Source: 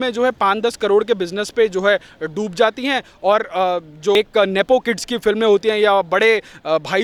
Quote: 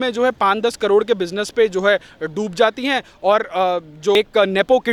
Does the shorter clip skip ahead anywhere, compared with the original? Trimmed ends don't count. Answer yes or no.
no